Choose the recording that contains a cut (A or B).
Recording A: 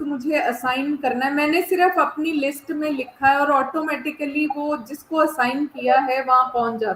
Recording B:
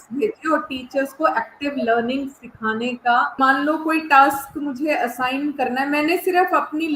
B